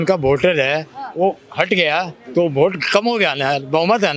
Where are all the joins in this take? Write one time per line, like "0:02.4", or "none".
none